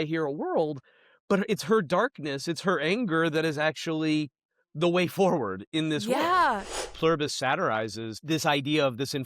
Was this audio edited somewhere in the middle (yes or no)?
yes